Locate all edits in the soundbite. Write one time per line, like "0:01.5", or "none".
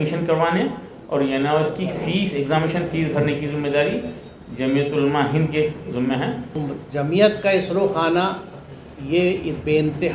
0:06.6